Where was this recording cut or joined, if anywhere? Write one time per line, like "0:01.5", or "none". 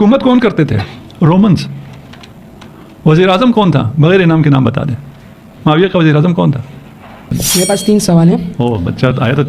0:07.4